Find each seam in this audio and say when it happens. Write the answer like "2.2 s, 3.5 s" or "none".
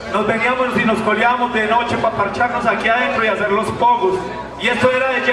none